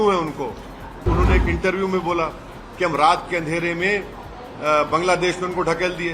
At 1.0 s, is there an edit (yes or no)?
yes